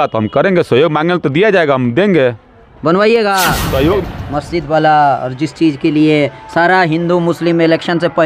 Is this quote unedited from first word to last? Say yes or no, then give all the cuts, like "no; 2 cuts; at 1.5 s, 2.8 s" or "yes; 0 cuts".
no; 1 cut; at 4.0 s